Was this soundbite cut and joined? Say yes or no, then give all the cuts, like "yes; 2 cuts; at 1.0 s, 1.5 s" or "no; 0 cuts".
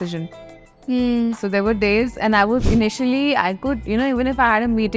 yes; 1 cut; at 2.6 s